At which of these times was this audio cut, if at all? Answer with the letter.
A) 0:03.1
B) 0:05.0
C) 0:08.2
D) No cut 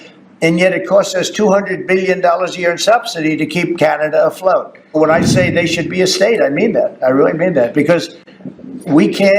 B